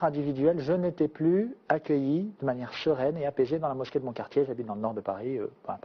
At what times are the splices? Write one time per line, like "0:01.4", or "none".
0:01.6